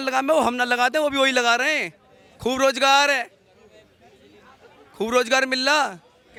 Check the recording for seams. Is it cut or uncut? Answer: uncut